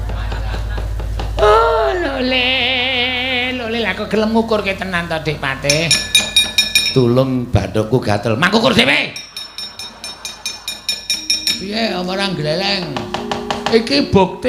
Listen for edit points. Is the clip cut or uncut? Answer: uncut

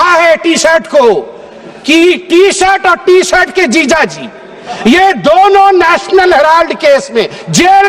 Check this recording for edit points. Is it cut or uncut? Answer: uncut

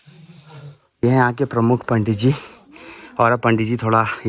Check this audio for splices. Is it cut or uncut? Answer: uncut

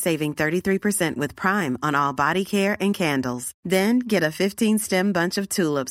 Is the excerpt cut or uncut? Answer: uncut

